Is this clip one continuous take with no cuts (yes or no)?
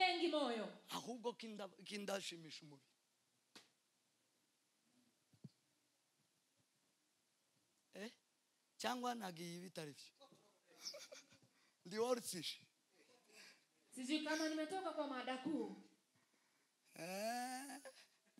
yes